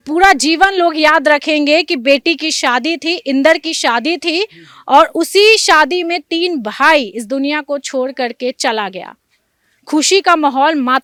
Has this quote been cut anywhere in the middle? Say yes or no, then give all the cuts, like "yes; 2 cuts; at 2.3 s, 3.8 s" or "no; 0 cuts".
no; 0 cuts